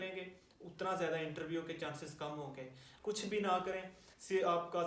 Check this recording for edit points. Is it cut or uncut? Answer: cut